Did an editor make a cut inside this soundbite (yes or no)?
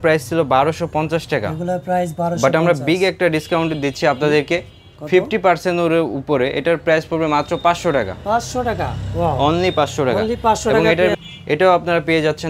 yes